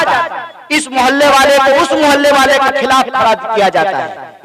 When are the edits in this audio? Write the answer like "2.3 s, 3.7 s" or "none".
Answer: none